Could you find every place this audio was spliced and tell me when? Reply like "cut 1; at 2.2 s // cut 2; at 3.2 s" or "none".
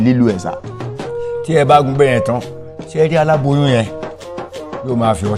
none